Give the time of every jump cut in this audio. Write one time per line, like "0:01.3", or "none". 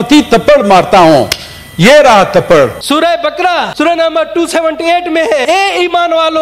0:03.2
0:05.4

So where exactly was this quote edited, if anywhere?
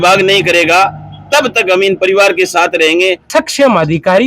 0:03.2

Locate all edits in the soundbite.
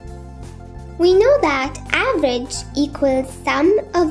0:01.0

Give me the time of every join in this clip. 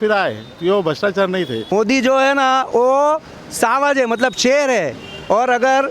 0:01.7

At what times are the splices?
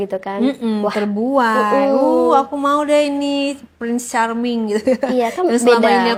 none

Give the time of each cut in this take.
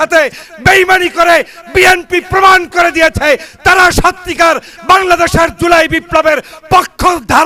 none

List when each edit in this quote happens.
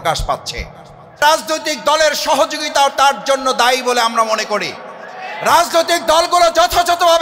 0:01.2

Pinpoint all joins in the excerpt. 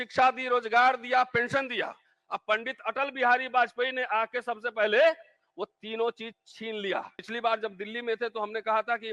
0:07.3

